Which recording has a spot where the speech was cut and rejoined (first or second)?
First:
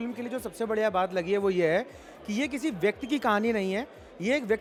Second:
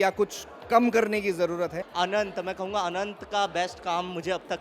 second